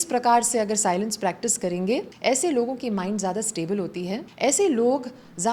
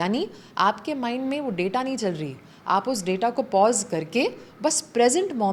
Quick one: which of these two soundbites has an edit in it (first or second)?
first